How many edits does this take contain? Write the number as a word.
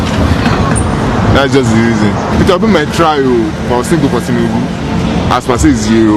zero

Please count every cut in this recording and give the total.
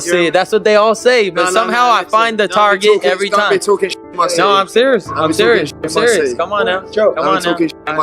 one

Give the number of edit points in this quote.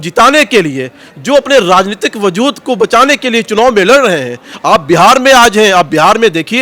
zero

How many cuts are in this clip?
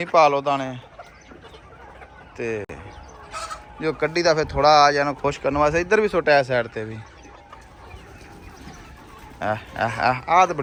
zero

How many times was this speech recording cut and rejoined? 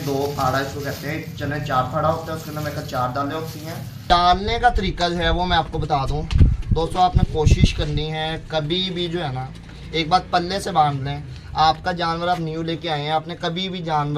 one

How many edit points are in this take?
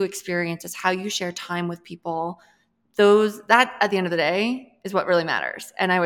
zero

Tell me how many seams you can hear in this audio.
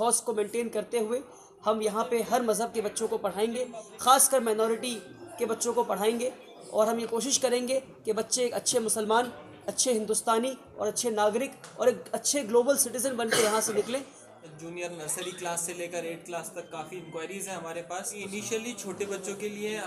two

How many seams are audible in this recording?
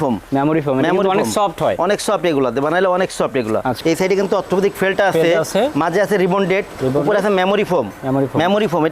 one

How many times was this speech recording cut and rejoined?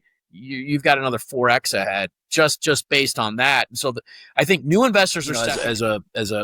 one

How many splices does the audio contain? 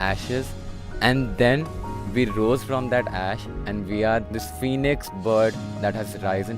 one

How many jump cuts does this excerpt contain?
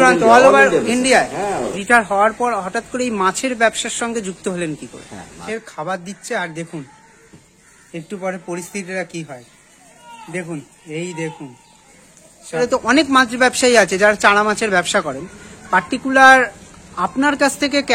three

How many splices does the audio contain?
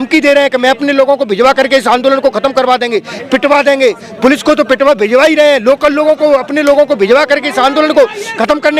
zero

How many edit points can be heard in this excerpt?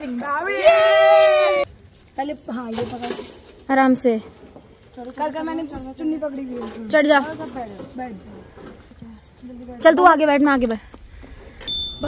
zero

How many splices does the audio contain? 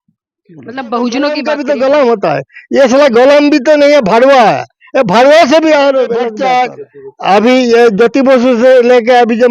two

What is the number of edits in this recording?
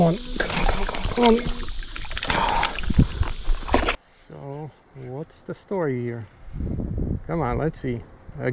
one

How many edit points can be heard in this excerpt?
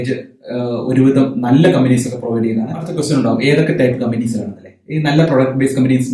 one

